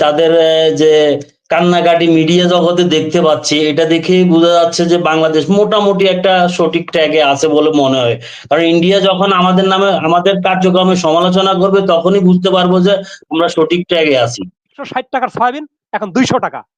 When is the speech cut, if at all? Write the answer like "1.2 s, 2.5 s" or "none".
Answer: 14.8 s